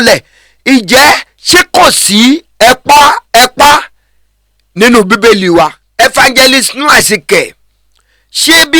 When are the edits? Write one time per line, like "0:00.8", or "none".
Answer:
0:05.8